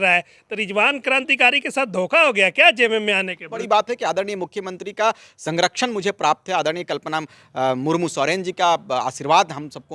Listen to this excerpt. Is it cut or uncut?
cut